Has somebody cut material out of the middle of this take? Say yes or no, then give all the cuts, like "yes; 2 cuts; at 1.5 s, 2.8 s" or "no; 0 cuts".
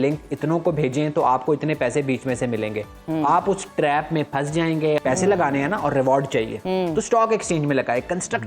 yes; 1 cut; at 5.0 s